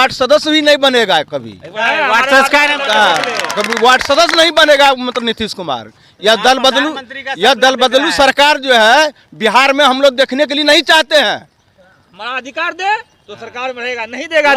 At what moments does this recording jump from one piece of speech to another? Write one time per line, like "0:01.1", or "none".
none